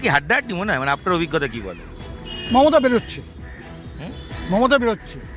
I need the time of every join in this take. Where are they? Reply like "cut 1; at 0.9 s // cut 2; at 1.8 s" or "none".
none